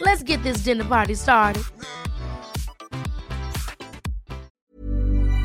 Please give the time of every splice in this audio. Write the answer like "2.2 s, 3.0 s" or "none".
4.5 s